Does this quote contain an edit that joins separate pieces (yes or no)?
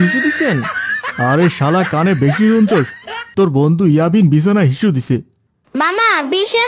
yes